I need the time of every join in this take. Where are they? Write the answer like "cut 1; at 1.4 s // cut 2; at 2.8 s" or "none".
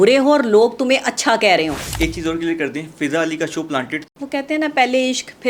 cut 1; at 1.8 s // cut 2; at 4.1 s